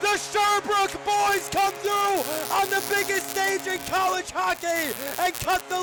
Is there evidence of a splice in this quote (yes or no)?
no